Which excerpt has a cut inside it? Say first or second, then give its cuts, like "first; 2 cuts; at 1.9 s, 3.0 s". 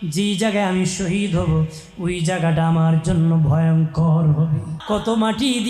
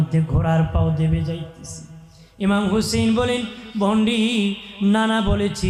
first; 1 cut; at 4.7 s